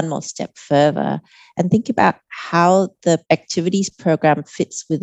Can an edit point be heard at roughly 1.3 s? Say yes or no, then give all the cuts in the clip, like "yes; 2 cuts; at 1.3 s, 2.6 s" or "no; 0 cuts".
no; 1 cut; at 3.2 s